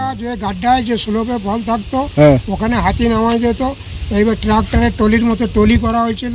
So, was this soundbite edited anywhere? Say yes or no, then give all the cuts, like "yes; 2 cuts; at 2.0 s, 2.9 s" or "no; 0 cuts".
no; 0 cuts